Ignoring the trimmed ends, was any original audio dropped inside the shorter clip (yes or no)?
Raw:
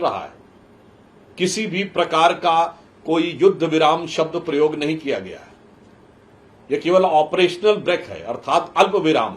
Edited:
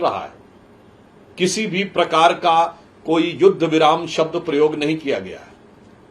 no